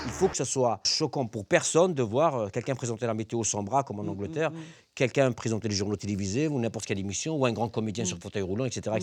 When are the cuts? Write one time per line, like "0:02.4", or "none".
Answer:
0:00.9